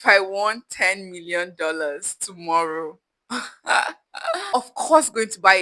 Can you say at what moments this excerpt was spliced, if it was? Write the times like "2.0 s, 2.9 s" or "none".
4.5 s

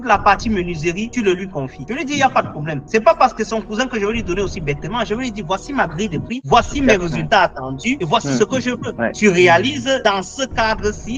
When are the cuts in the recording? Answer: none

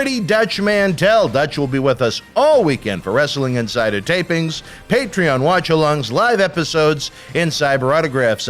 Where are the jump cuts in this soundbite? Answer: none

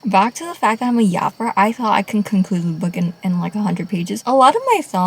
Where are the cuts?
4.1 s

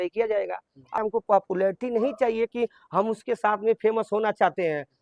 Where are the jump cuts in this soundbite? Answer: 1.0 s

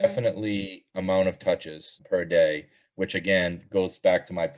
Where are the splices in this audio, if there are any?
2.0 s

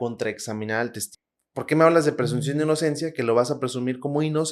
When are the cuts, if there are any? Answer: 1.1 s

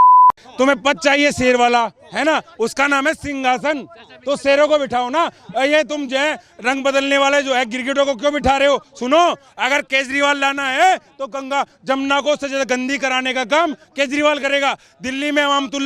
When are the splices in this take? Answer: none

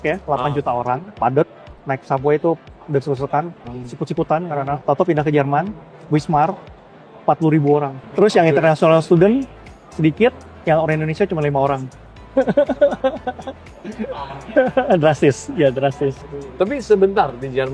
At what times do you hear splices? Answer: none

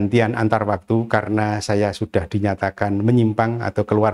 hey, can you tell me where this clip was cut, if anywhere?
none

